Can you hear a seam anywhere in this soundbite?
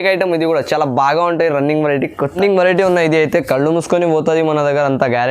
yes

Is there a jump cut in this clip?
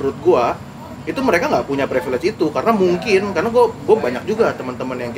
no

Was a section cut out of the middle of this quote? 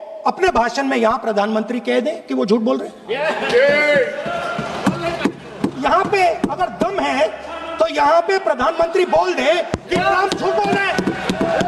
no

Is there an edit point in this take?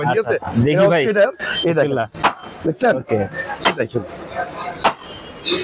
no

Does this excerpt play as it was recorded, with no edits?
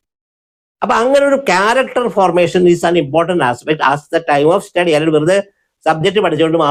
yes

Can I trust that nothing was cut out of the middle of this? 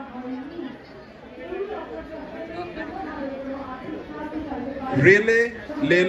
yes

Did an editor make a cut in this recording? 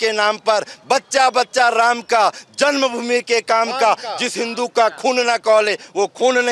no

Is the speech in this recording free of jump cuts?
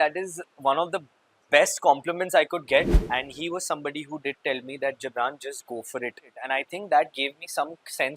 no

